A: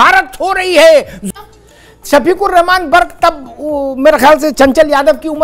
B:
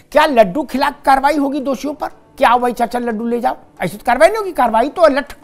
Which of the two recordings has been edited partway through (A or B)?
A